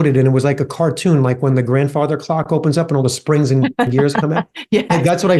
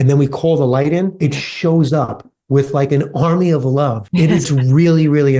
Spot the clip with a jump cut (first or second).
second